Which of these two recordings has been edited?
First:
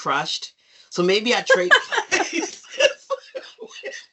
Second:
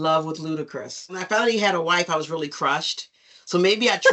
second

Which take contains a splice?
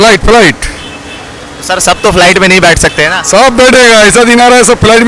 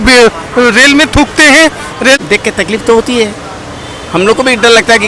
second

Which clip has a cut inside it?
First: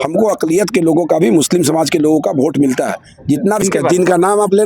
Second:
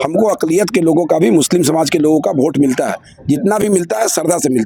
first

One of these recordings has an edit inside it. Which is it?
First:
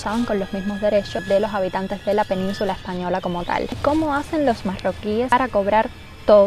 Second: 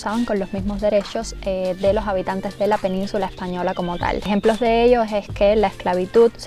first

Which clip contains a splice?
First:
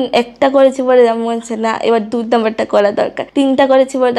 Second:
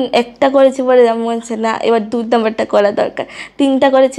first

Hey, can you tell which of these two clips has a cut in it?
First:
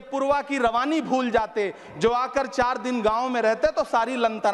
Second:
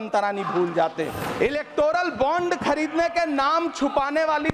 second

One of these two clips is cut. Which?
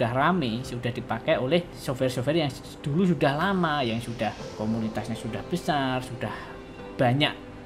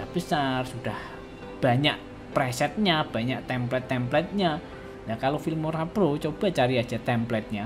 first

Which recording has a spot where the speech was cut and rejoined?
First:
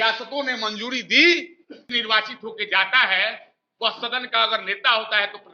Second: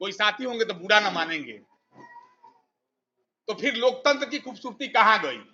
first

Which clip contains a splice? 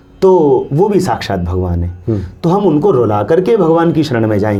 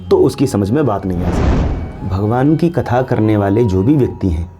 second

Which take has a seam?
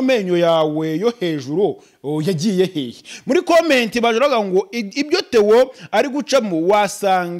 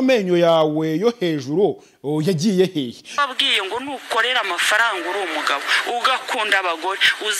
second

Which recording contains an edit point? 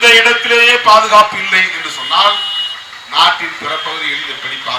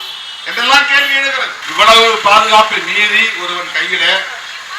second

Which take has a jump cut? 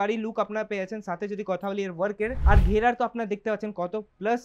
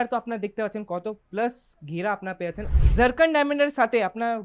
second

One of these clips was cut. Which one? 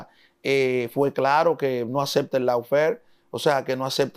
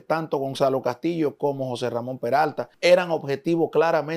second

